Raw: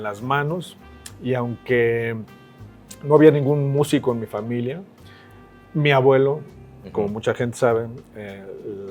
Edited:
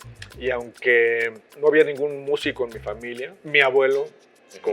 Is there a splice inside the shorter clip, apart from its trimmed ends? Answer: yes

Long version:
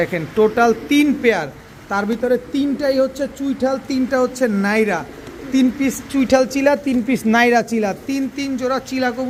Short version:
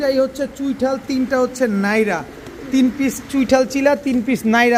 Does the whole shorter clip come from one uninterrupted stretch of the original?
yes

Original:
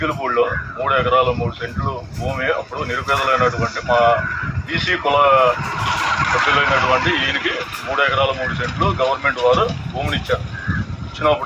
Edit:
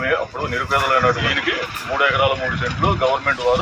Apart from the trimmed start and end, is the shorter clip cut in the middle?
yes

